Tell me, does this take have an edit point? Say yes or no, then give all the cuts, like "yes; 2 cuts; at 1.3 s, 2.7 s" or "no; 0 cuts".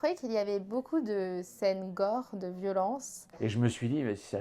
yes; 1 cut; at 3.3 s